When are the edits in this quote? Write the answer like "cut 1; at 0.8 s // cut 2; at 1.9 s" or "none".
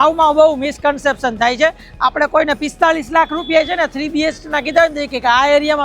none